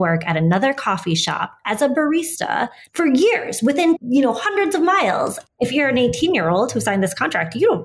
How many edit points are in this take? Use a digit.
3